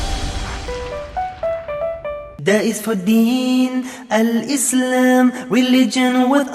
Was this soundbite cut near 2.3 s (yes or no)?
yes